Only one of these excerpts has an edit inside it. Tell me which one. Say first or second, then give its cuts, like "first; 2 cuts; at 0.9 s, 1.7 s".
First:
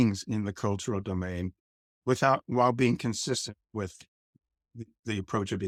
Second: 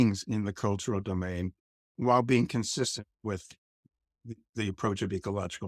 second; 1 cut; at 1.9 s